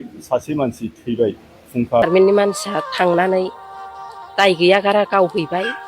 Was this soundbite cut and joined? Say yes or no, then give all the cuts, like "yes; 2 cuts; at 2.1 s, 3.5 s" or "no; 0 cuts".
yes; 1 cut; at 2.0 s